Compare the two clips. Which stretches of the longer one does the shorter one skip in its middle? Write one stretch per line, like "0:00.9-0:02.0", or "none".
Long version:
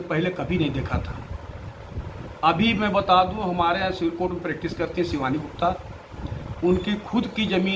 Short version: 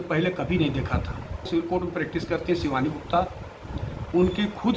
0:01.5-0:04.0